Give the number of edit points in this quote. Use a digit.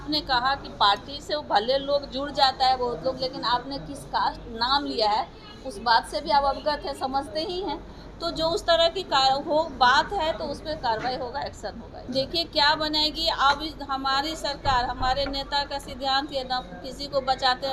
1